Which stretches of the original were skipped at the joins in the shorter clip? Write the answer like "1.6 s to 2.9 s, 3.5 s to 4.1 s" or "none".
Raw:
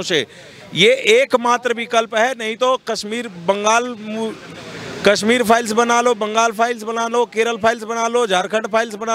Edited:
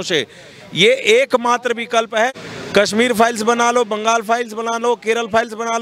2.4 s to 4.7 s